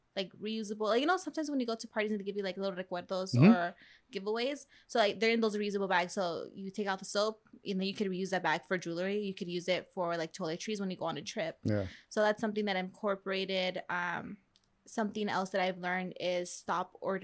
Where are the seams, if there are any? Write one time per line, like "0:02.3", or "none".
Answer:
none

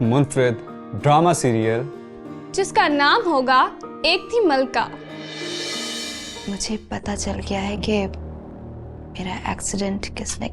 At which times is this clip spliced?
0:06.3

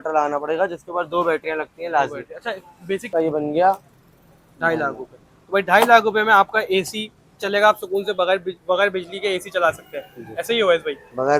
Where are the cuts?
0:03.1

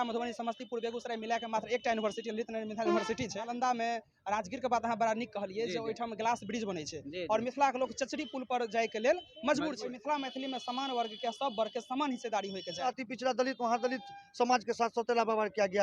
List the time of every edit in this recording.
0:03.4
0:09.8
0:12.8

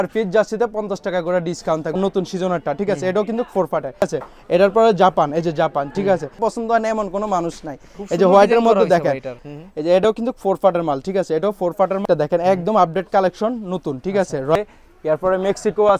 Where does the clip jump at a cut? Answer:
0:02.0
0:04.0
0:06.4
0:09.4
0:12.0
0:14.5

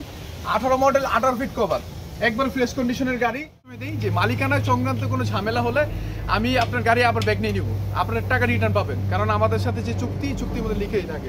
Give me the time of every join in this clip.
0:03.8

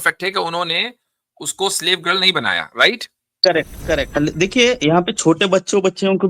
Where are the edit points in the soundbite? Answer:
0:04.1

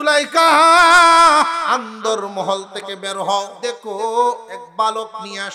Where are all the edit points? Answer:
0:01.6
0:03.5
0:04.6

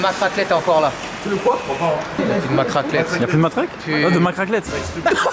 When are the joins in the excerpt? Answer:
0:02.2

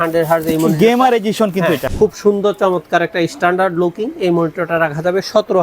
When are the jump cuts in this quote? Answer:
0:01.8

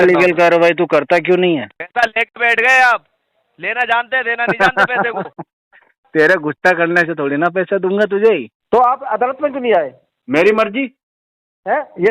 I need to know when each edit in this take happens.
0:01.8
0:08.5

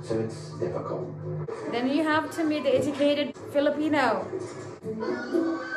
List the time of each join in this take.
0:01.4
0:03.4
0:04.8

